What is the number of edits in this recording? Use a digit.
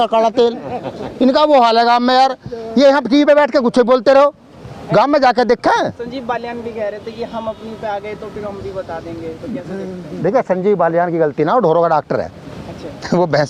0